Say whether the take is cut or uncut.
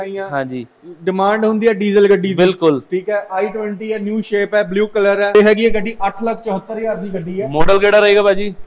cut